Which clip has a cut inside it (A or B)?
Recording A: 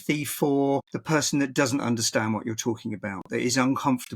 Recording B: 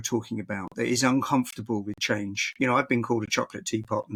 A